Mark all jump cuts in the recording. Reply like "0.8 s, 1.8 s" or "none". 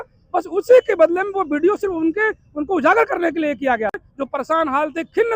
4.1 s